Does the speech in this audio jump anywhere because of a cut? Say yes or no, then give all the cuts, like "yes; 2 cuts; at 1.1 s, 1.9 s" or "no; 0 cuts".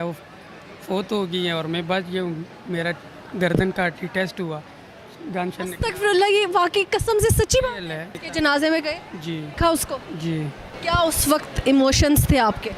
yes; 3 cuts; at 8.2 s, 9.5 s, 10.7 s